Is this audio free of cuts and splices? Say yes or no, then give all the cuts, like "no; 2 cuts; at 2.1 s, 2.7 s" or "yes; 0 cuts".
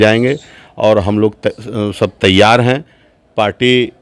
yes; 0 cuts